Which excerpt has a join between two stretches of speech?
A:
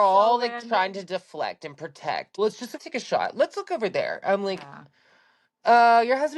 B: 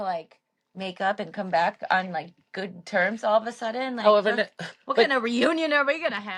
A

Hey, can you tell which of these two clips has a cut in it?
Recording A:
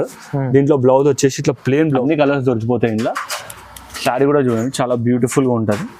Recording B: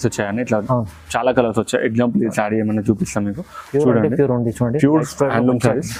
A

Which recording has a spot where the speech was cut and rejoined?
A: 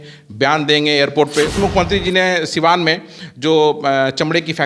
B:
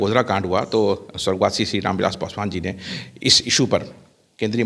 A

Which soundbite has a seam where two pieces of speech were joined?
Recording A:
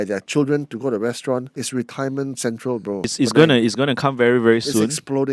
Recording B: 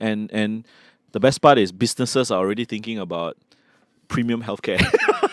A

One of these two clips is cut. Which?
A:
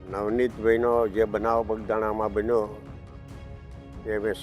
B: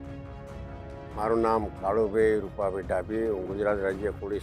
B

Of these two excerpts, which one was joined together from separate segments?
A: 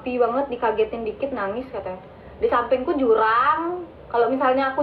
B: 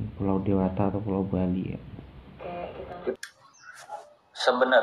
B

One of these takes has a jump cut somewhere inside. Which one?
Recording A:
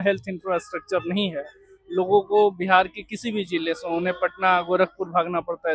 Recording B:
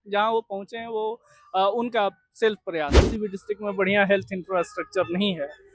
B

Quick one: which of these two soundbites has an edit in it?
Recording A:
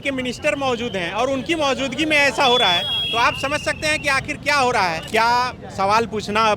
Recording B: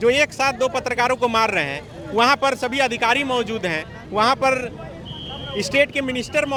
A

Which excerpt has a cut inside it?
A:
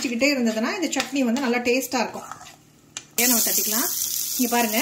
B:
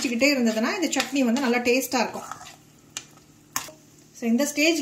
A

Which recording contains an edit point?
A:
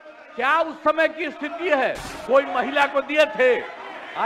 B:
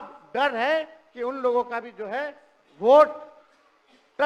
A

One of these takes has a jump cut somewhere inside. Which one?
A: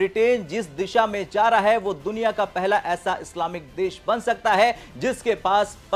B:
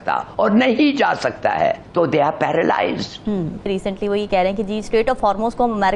B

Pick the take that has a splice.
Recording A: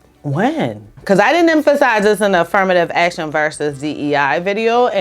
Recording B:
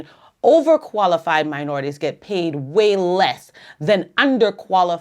A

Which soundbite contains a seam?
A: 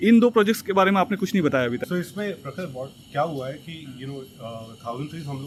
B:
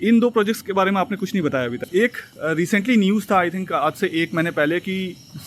B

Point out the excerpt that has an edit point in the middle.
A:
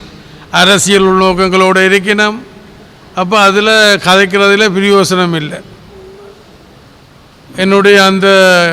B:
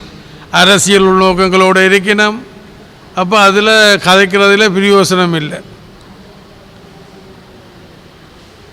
A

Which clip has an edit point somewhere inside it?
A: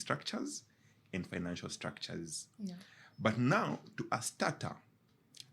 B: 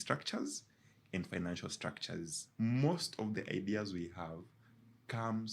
B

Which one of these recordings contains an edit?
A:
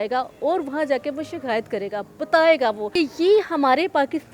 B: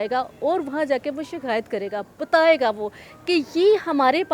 A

